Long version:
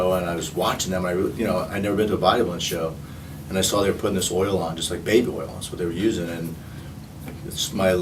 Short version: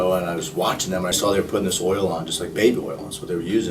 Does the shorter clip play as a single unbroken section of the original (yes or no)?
no